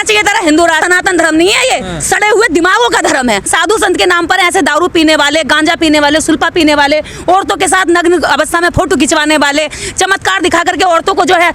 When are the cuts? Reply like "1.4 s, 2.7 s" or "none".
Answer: 0.8 s, 3.5 s